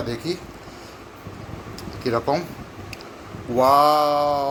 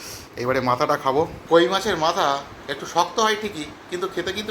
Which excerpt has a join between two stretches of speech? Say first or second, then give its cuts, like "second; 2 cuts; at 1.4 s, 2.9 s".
second; 1 cut; at 1.4 s